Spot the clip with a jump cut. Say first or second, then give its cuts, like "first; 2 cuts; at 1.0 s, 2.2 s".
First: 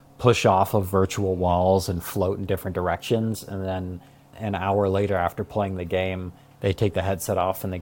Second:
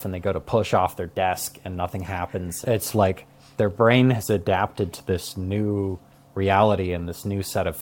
first; 1 cut; at 4.3 s